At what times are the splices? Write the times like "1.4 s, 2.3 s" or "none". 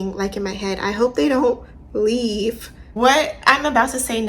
2.9 s